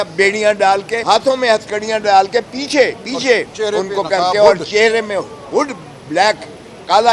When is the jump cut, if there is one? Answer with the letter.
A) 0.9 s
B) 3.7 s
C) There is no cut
A